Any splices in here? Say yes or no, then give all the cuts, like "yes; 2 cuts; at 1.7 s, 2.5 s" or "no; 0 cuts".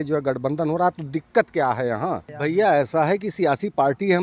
yes; 1 cut; at 2.3 s